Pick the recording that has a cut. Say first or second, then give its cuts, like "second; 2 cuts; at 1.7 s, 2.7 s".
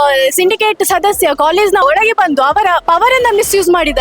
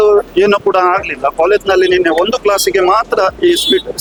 first; 2 cuts; at 1.8 s, 2.8 s